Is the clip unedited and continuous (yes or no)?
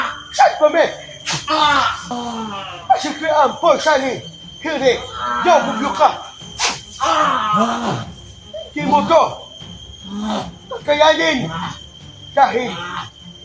no